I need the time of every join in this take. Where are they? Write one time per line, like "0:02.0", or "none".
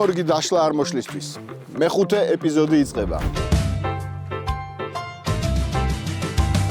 0:03.2